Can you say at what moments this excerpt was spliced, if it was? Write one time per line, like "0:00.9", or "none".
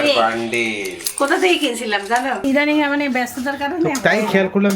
0:02.4